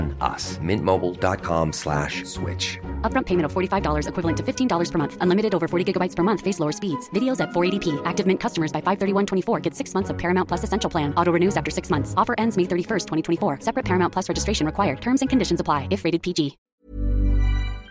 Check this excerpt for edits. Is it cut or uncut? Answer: cut